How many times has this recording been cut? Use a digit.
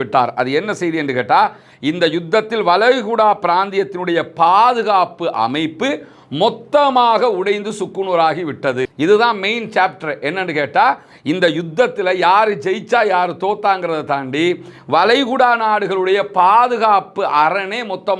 0